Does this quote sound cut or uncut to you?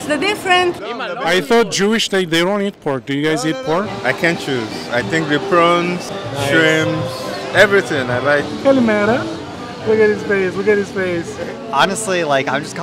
cut